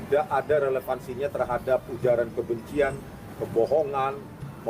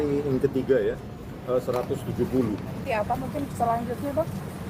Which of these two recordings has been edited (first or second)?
second